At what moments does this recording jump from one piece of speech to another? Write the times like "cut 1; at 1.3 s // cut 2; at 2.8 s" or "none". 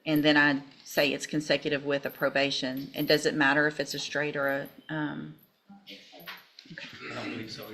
none